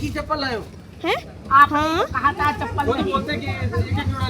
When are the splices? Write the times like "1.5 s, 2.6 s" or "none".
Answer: none